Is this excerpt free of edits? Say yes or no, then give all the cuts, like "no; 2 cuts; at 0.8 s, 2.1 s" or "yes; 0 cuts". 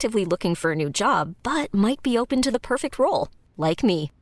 yes; 0 cuts